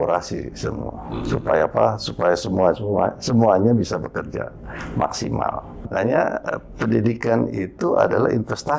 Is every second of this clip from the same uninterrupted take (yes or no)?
no